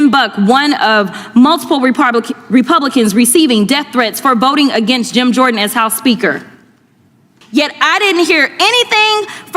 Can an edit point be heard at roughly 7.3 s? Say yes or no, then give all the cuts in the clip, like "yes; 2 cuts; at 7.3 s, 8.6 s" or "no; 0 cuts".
yes; 1 cut; at 7.3 s